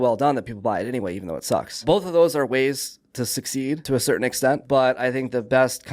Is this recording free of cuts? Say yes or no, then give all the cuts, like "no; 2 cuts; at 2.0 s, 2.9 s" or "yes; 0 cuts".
no; 2 cuts; at 1.8 s, 4.6 s